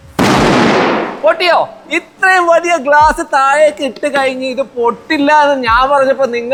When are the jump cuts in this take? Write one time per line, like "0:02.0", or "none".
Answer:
none